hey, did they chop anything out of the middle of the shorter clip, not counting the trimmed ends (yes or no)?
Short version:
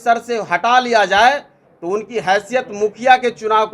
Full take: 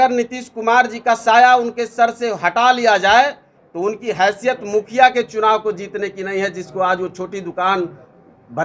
no